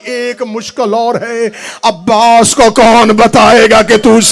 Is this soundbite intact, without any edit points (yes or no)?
yes